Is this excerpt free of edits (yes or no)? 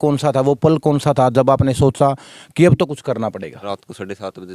no